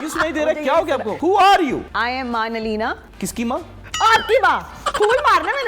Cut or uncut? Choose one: cut